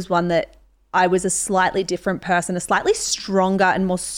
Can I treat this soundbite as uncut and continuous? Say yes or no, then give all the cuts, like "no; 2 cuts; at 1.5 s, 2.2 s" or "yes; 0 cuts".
yes; 0 cuts